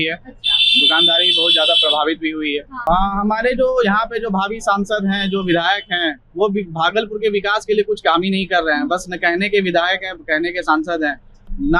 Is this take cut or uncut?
cut